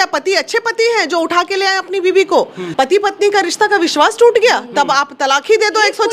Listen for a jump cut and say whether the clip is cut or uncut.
cut